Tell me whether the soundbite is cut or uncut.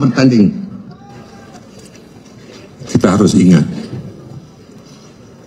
cut